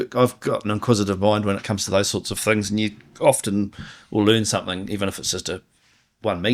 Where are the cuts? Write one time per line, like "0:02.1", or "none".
none